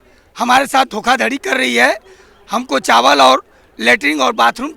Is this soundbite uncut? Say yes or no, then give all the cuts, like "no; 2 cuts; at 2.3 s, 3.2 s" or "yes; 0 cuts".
yes; 0 cuts